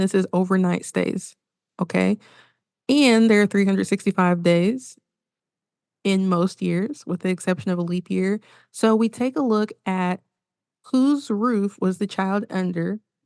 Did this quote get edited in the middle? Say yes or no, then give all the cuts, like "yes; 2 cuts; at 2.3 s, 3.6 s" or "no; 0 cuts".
no; 0 cuts